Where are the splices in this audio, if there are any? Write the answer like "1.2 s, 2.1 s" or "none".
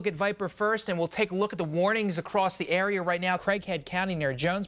3.4 s

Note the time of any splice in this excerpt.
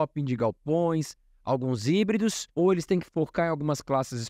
2.4 s

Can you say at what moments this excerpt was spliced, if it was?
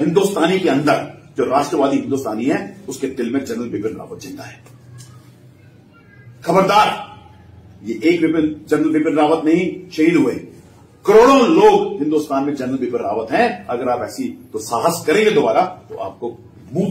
none

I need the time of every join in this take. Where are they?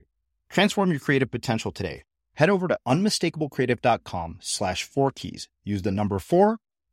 none

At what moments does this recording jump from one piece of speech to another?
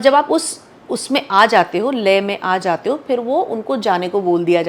none

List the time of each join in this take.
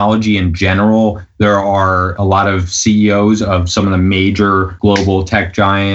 2.1 s, 4.7 s

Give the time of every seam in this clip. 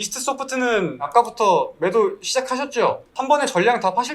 3.1 s

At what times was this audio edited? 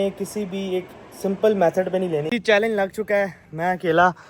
2.3 s

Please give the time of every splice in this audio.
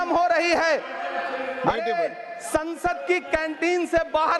none

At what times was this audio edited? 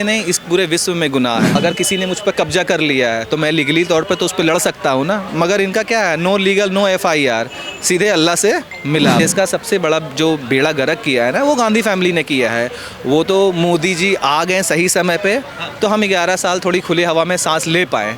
1.6 s, 9.2 s

